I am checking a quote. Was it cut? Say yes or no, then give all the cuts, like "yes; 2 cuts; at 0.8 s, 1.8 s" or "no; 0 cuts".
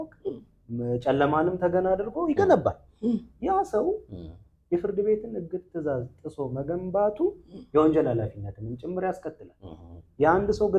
no; 0 cuts